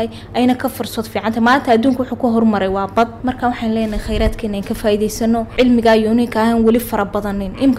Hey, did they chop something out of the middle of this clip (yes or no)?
yes